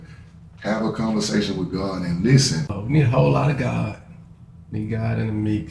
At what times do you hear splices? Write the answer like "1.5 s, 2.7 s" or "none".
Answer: 2.8 s

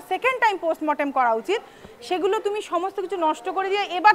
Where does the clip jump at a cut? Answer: none

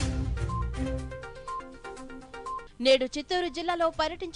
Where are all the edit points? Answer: 2.7 s

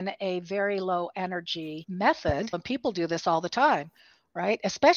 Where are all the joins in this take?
1.8 s, 2.6 s

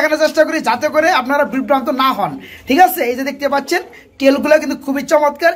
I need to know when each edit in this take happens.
none

